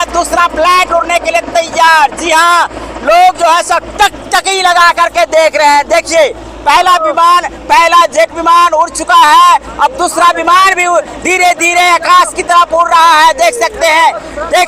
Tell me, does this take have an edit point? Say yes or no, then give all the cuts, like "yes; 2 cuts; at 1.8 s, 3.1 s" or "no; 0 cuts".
no; 0 cuts